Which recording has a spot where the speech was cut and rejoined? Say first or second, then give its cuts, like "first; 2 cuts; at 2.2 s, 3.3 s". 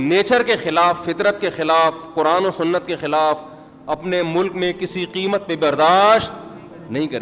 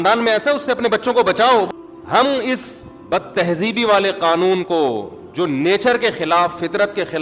second; 1 cut; at 1.7 s